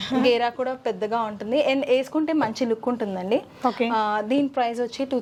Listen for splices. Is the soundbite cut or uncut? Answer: uncut